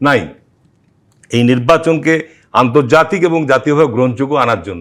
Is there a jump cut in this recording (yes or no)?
no